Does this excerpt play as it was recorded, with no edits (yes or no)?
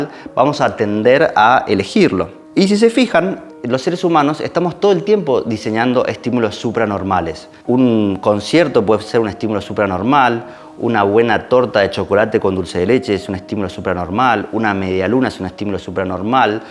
yes